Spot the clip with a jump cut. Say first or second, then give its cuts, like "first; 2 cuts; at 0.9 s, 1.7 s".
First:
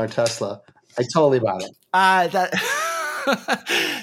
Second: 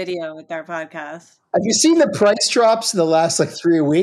first; 1 cut; at 1.7 s